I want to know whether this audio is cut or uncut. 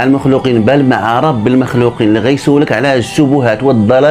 uncut